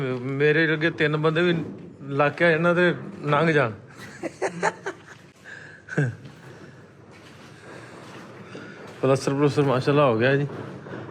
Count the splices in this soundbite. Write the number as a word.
zero